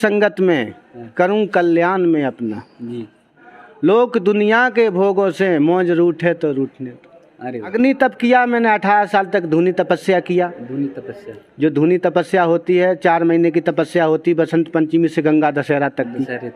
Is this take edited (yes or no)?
yes